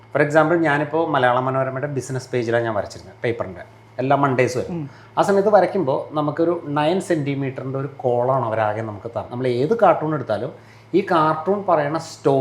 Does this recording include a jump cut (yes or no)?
yes